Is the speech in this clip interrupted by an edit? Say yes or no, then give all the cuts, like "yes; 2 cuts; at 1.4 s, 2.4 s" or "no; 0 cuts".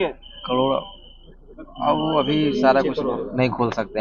no; 0 cuts